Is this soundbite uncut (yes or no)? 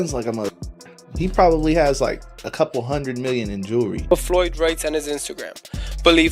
no